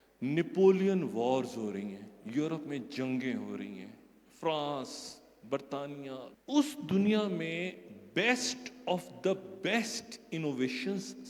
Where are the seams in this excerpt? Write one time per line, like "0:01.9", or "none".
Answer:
0:06.3